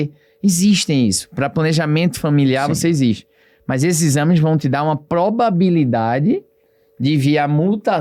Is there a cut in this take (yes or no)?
no